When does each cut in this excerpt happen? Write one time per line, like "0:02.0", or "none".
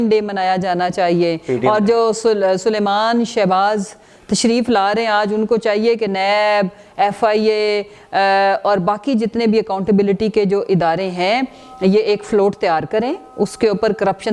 none